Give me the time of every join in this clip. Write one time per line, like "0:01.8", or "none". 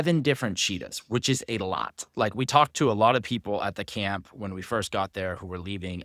none